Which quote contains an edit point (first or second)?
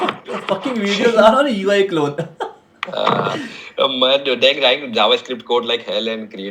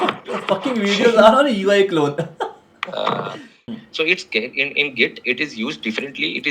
second